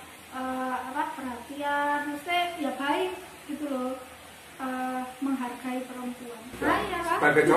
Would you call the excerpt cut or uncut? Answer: cut